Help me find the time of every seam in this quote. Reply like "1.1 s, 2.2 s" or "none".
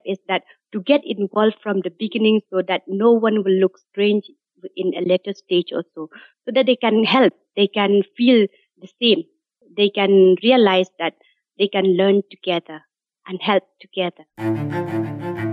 14.3 s